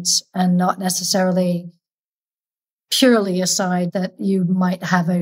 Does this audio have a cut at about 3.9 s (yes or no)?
yes